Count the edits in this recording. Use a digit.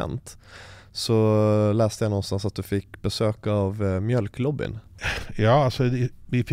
1